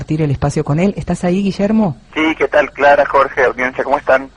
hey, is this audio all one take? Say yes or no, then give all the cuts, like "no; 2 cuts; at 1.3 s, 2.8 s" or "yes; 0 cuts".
yes; 0 cuts